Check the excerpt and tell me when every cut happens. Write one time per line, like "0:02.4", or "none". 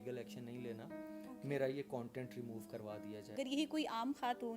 0:03.3